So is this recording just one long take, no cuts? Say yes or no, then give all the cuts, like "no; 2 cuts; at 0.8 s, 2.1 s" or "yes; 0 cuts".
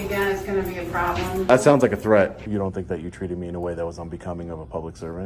no; 2 cuts; at 1.4 s, 2.5 s